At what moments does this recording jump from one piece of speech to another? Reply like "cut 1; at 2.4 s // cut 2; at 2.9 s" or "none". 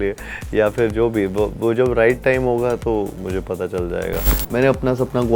cut 1; at 4.3 s